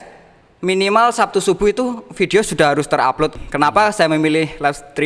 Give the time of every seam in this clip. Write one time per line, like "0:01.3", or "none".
0:03.3